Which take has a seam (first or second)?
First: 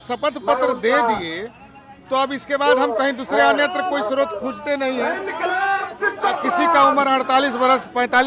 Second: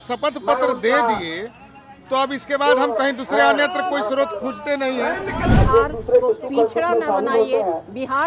second